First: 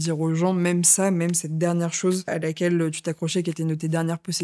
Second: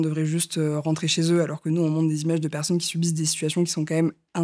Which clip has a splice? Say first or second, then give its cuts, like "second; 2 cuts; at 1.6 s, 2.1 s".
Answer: first; 1 cut; at 2.3 s